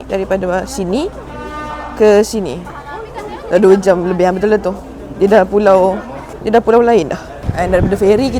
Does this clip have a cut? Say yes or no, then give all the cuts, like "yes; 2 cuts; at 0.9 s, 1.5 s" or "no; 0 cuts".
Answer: no; 0 cuts